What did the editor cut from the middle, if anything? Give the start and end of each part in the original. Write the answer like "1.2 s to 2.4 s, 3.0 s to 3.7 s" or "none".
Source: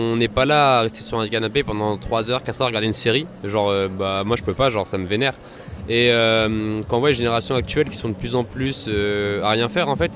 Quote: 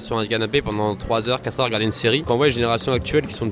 3.3 s to 6.9 s